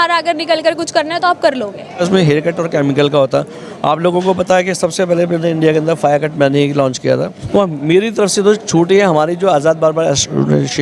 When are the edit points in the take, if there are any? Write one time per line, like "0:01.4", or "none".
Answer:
0:02.0
0:07.4